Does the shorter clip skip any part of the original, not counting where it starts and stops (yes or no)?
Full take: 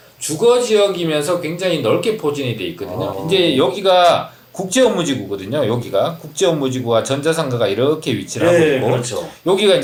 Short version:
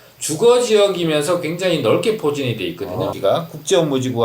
yes